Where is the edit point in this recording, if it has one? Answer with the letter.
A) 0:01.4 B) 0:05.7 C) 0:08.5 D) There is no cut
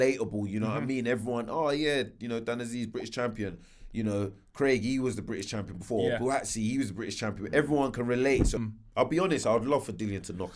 C